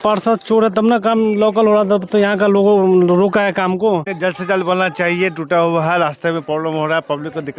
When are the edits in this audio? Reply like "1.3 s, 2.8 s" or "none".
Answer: 4.1 s